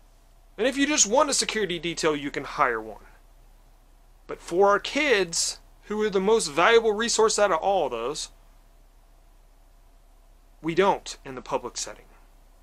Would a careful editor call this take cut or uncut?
uncut